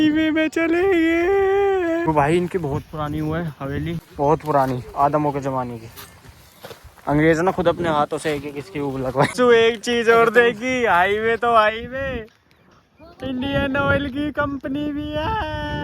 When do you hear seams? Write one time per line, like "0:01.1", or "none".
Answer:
0:02.1
0:04.1
0:09.3